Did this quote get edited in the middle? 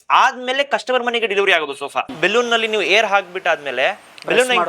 yes; 1 cut; at 2.1 s

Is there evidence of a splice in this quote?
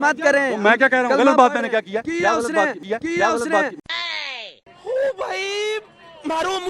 no; 0 cuts

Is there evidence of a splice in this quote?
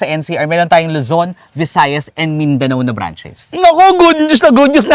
no; 0 cuts

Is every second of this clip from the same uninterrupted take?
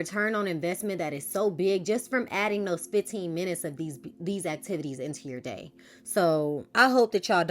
no; 1 cut; at 6.6 s

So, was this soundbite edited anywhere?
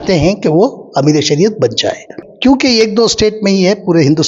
yes; 1 cut; at 2.2 s

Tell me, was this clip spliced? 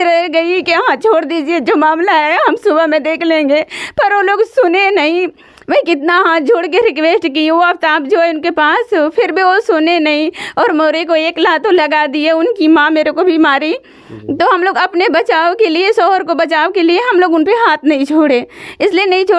no; 0 cuts

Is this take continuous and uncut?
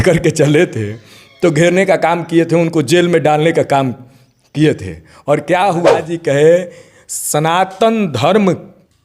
no; 1 cut; at 6.1 s

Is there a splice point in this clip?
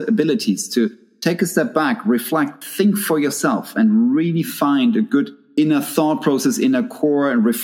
yes; 1 cut; at 5.4 s

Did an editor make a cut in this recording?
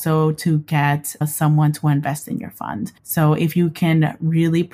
yes; 1 cut; at 3.0 s

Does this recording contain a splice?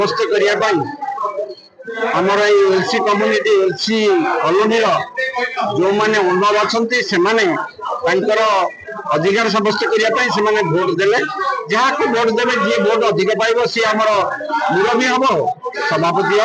no; 0 cuts

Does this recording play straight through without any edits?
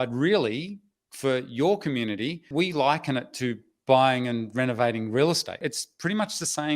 no; 2 cuts; at 2.5 s, 5.6 s

